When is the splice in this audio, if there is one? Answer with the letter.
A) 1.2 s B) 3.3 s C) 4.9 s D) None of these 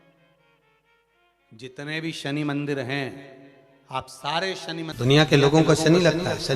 C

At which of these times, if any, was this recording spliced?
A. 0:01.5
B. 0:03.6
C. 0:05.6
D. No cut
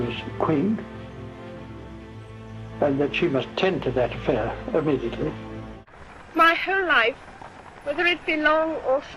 C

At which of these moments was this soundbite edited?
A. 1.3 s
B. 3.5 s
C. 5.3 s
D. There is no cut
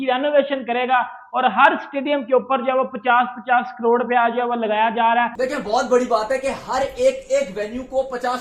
C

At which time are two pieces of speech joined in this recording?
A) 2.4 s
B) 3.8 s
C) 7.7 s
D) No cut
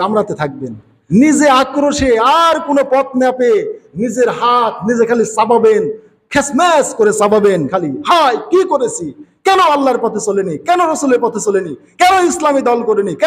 C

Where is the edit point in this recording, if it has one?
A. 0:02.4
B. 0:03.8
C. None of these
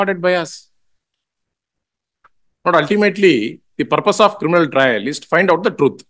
C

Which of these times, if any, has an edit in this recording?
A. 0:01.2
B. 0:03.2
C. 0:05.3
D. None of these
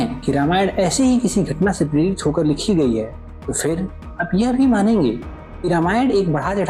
D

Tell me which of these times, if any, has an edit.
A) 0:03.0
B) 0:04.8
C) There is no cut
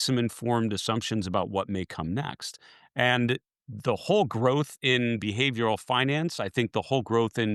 C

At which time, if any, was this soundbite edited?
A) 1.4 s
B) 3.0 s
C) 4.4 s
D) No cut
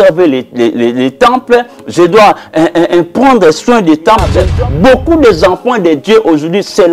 C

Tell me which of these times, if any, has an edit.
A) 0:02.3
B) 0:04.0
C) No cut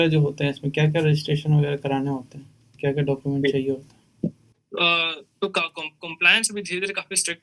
C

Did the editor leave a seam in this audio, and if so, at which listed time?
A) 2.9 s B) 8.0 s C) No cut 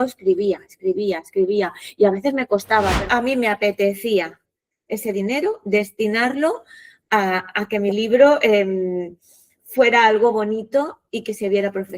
A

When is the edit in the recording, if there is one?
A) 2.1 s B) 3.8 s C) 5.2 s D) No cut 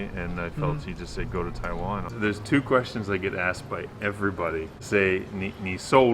A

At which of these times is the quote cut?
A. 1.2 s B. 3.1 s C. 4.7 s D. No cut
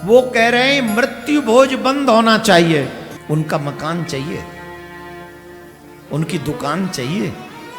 B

